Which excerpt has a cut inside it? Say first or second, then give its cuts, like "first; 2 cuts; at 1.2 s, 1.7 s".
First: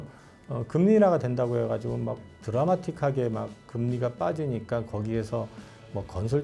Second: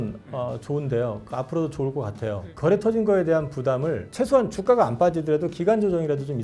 second; 2 cuts; at 2.4 s, 4.1 s